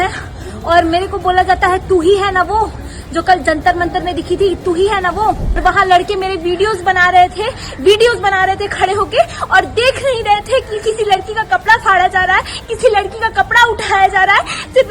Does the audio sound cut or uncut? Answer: cut